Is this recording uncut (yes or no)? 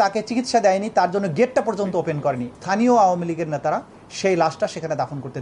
no